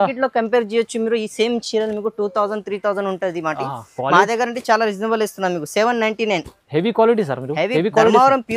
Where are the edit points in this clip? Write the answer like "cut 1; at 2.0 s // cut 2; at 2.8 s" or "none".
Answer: none